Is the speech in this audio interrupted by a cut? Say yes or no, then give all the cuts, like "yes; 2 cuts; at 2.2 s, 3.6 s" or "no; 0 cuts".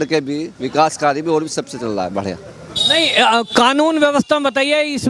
no; 0 cuts